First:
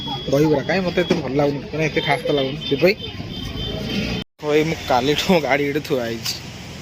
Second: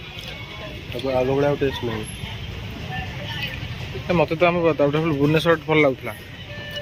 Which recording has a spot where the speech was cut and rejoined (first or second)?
first